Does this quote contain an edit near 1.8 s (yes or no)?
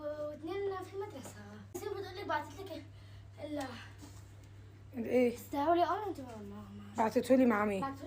yes